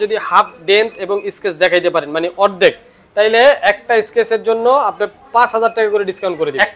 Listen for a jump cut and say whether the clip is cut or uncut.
uncut